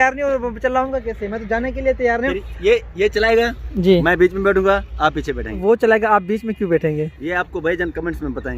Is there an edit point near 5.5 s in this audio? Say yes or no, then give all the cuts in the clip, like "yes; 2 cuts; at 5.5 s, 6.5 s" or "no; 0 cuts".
yes; 1 cut; at 5.5 s